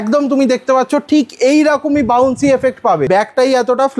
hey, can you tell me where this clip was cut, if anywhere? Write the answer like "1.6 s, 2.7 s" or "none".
3.1 s